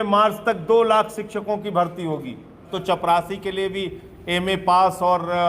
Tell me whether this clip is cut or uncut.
cut